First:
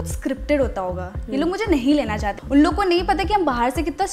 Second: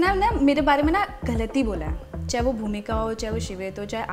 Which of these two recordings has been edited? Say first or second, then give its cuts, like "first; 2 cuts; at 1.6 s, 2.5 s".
first; 1 cut; at 2.3 s